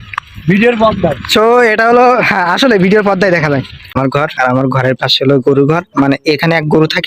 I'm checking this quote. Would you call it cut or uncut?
cut